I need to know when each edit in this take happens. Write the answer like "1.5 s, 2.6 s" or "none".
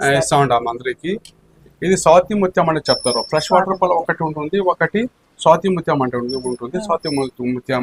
1.6 s